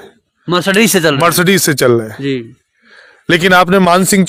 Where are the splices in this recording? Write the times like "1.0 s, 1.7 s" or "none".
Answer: none